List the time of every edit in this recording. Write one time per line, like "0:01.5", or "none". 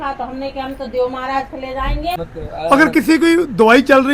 0:02.3